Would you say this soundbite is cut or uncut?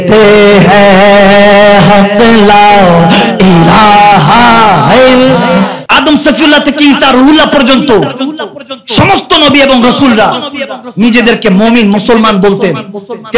cut